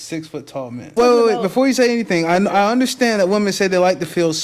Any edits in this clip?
yes; 1 cut; at 0.9 s

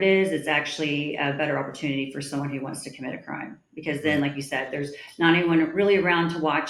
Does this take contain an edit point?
no; 0 cuts

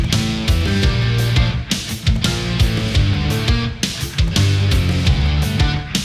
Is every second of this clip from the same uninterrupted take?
yes; 0 cuts

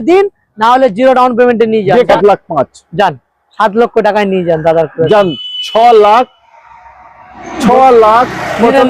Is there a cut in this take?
yes; 1 cut; at 2.1 s

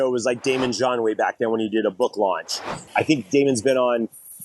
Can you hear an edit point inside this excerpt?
yes; 1 cut; at 2.8 s

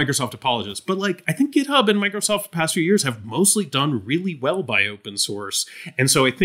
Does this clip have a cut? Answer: no; 0 cuts

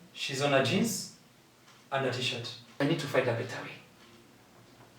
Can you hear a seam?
yes; 1 cut; at 2.8 s

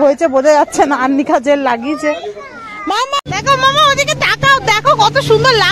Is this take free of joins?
no; 1 cut; at 3.2 s

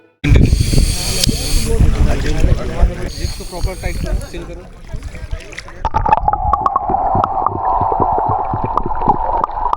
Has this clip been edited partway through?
yes; 1 cut; at 3.1 s

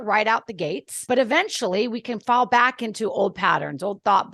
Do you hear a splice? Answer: yes; 1 cut; at 1.1 s

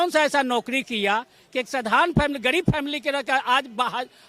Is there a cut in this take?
no; 0 cuts

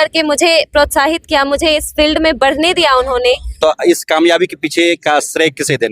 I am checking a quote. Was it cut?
yes; 1 cut; at 3.5 s

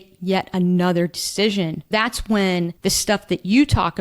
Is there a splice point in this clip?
yes; 2 cuts; at 1.9 s, 2.7 s

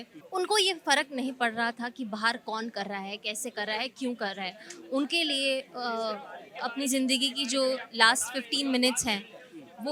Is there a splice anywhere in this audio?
no; 0 cuts

